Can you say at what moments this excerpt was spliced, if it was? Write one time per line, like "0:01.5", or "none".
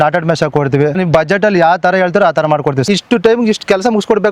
0:01.0
0:02.8